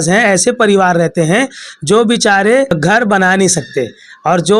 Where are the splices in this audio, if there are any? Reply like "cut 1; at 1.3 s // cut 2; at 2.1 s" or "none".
cut 1; at 2.8 s